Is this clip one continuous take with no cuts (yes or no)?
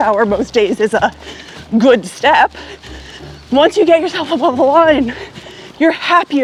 yes